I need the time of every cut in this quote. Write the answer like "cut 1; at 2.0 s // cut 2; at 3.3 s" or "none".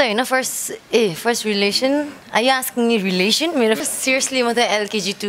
cut 1; at 3.8 s